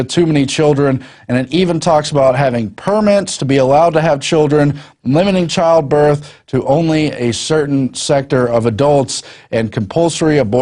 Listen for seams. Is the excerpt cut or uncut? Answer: cut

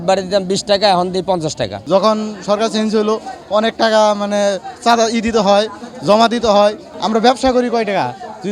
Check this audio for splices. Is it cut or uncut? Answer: cut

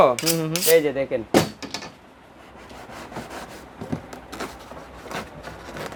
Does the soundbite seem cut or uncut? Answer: uncut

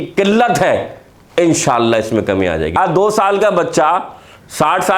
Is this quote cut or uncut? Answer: cut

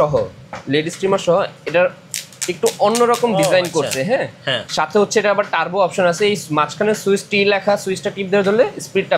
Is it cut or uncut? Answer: uncut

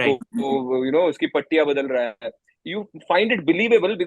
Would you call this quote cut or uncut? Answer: uncut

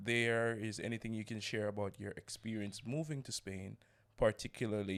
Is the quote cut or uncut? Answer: uncut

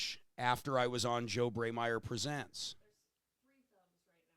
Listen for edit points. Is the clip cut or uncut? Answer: uncut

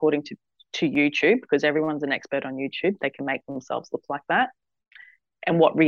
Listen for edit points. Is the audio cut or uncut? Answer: uncut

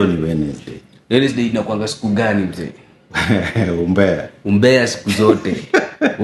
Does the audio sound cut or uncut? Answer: uncut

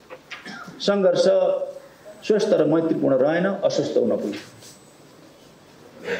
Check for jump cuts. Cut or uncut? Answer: uncut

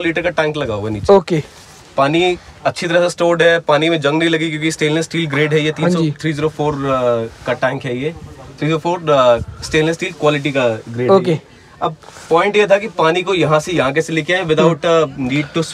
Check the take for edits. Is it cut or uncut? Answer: uncut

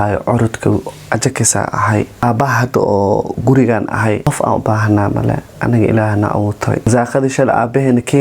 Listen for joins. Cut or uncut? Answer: cut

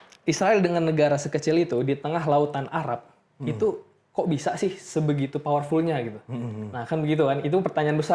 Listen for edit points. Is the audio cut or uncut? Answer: uncut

